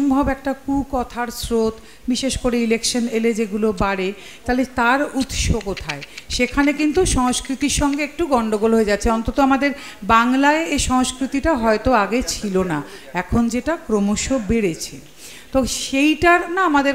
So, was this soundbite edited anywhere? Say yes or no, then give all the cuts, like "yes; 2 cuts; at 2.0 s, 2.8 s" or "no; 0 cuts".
no; 0 cuts